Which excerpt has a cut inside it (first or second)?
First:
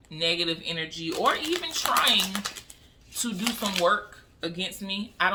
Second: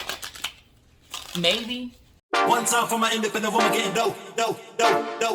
second